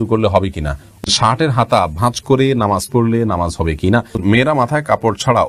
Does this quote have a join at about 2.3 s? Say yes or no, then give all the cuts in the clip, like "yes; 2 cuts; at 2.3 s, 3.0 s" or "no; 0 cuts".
no; 2 cuts; at 1.1 s, 4.2 s